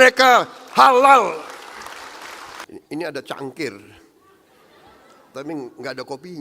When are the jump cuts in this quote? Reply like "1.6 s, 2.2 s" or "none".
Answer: 2.6 s